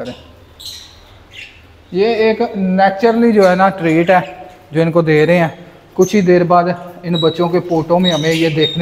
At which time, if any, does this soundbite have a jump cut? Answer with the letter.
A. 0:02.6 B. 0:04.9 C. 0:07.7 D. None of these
D